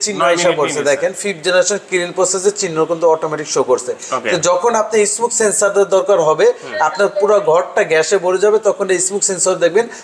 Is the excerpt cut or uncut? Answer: uncut